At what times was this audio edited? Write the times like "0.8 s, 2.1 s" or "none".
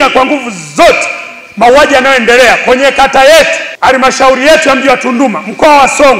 3.6 s